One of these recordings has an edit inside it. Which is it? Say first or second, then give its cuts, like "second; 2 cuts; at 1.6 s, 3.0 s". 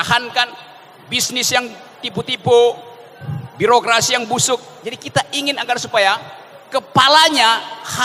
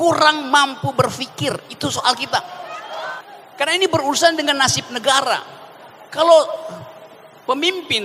second; 1 cut; at 3.1 s